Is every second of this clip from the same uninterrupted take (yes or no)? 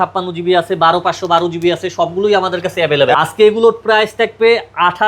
no